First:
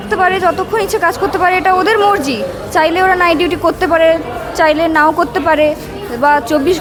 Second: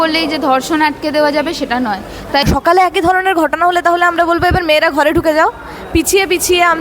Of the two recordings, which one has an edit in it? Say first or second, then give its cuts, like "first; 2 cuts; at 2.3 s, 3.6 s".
second; 1 cut; at 2.4 s